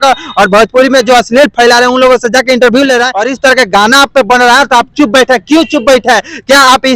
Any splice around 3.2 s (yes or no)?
yes